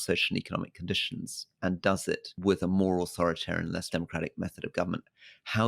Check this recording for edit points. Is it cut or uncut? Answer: cut